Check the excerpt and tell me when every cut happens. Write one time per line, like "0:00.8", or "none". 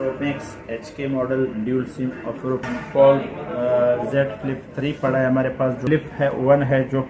0:02.7
0:05.8

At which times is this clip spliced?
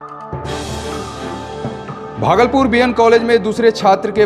0:01.9

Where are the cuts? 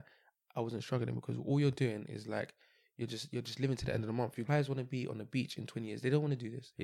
0:04.5

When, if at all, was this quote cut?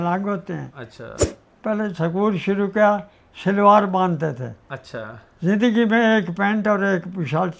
0:01.4

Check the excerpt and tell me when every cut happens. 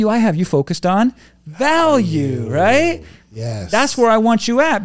none

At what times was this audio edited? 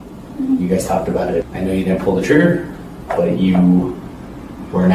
0:01.5

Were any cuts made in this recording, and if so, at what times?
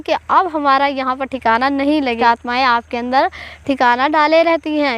0:02.2

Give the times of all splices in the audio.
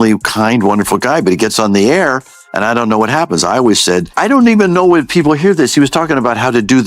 0:04.1

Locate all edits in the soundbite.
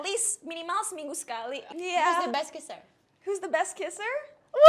0:01.7

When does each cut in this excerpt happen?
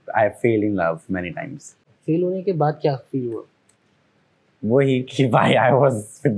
0:01.9

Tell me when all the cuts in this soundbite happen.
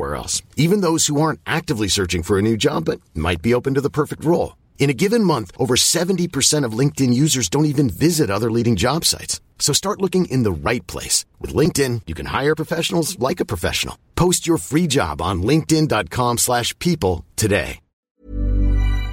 0:18.0

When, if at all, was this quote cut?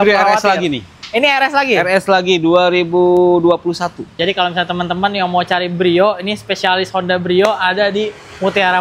0:04.1

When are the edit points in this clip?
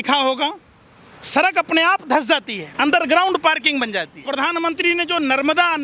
0:02.6
0:04.1

